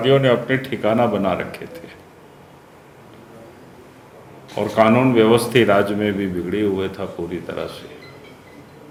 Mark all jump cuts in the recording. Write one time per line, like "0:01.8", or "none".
none